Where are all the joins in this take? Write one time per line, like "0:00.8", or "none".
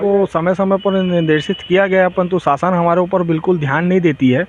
none